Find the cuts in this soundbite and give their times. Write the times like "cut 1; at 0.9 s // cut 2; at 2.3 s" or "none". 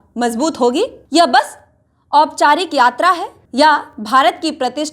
cut 1; at 1.0 s // cut 2; at 3.4 s